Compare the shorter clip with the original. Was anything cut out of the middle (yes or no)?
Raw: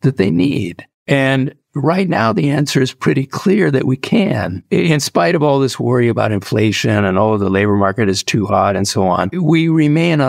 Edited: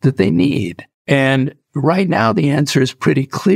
no